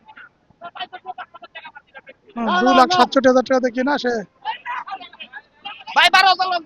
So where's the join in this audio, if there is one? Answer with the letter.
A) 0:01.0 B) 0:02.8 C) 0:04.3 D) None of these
C